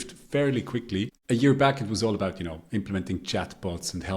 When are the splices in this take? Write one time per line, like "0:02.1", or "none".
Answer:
0:01.2